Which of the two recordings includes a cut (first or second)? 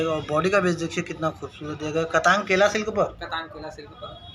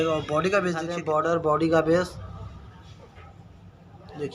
second